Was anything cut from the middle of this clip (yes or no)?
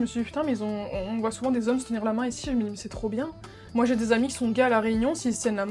no